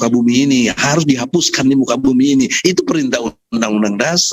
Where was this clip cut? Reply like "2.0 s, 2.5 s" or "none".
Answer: none